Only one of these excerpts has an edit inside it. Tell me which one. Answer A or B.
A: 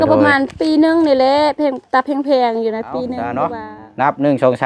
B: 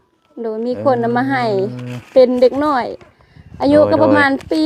A